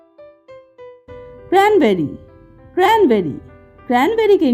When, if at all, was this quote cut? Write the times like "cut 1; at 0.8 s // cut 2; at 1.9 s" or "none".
cut 1; at 1.3 s